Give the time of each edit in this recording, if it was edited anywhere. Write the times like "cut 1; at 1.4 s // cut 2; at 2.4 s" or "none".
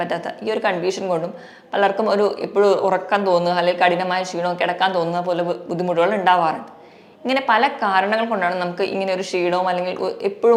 none